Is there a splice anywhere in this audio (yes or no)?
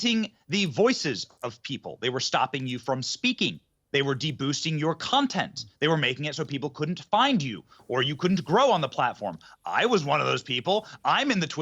no